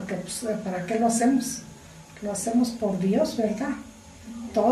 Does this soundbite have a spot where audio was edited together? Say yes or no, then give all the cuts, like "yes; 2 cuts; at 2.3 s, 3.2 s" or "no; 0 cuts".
yes; 1 cut; at 1.3 s